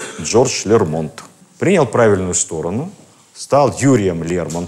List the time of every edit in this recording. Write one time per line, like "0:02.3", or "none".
none